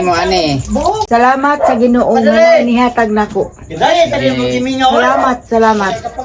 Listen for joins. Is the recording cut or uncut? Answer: cut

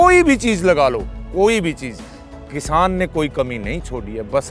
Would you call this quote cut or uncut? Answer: uncut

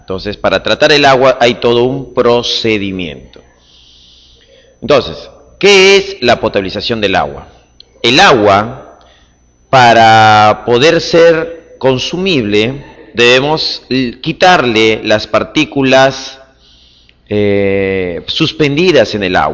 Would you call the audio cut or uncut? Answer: uncut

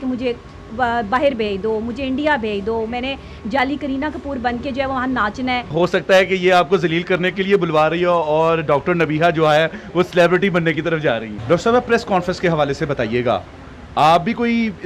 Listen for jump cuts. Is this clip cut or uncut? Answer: cut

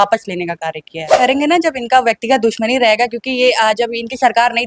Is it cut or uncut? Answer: cut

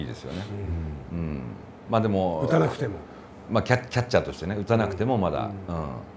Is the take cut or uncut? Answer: uncut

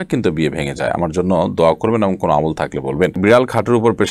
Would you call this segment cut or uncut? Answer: cut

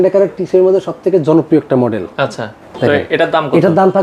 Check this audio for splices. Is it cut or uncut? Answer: uncut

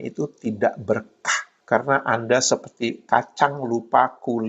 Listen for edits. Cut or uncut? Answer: cut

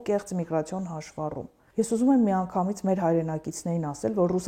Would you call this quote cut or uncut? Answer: cut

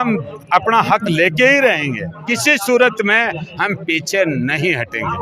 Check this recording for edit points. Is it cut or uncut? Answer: cut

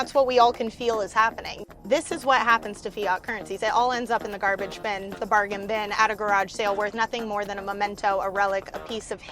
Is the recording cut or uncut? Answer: cut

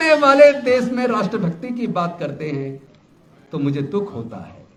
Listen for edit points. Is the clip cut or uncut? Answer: uncut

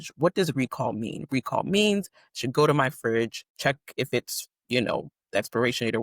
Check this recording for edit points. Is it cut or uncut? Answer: cut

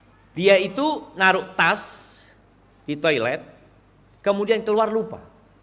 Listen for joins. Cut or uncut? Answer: uncut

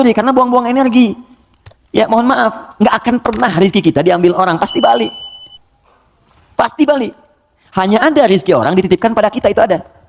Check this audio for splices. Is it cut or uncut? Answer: uncut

